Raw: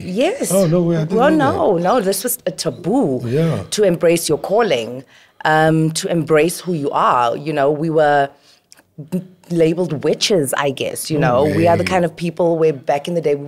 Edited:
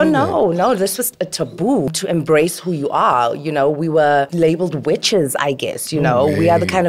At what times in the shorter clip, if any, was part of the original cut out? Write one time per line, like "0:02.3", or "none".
0:01.9
0:04.3